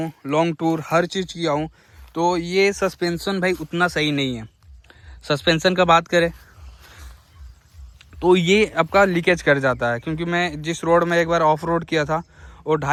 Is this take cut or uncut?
uncut